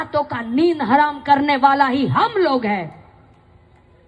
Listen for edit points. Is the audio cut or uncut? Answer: uncut